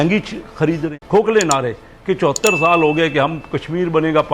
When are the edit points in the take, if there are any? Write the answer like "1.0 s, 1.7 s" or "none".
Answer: 0.9 s